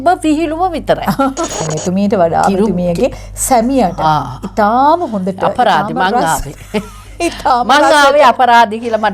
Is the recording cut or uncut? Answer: cut